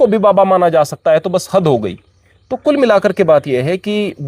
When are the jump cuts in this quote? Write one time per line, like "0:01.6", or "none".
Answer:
none